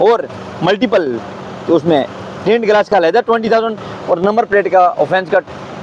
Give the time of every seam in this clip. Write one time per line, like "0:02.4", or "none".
none